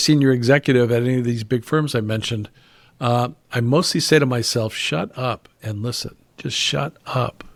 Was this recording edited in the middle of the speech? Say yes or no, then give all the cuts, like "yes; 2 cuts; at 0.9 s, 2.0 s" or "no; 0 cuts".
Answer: no; 0 cuts